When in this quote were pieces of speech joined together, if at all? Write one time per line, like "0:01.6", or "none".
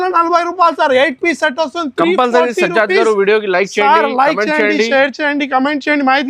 none